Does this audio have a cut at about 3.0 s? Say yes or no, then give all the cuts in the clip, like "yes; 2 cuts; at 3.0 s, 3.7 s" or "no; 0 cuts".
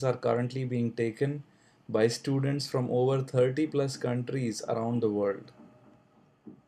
yes; 1 cut; at 3.0 s